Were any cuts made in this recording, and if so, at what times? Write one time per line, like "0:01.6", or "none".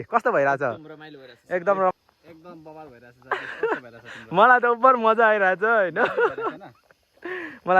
0:01.9

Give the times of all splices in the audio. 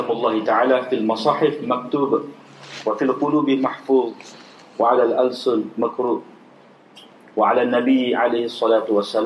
none

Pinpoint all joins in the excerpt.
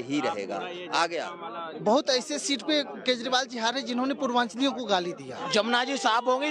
0:01.6
0:05.4

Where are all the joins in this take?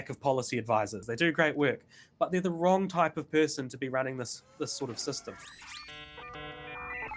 0:01.0
0:05.7

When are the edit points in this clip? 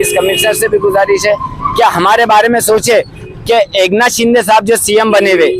0:03.2

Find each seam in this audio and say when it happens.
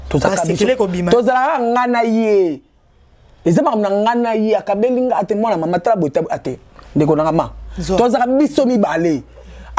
none

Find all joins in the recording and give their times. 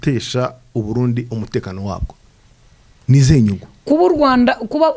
none

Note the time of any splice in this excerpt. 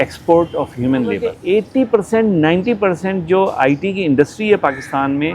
0:01.3

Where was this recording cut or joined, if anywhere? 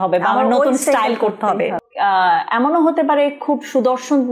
0:01.8

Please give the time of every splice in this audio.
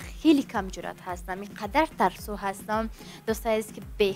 none

